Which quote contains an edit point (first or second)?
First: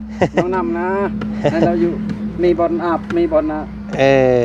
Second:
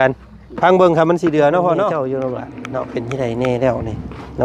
second